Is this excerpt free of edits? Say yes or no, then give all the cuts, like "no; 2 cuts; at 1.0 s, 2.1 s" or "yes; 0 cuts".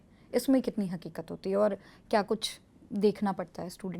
yes; 0 cuts